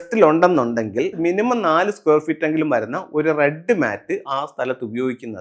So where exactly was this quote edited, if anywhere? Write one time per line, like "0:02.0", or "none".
0:01.2